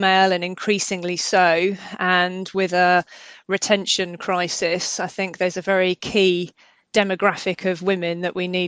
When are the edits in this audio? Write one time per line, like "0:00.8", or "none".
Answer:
none